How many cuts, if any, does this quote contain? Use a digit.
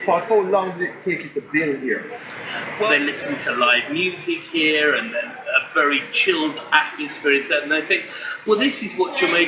1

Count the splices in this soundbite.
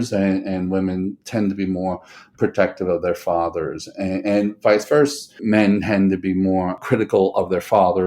2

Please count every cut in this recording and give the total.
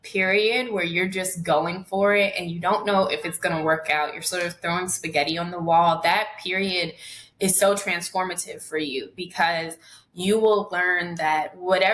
0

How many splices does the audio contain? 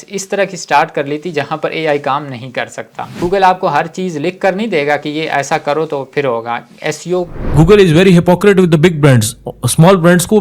2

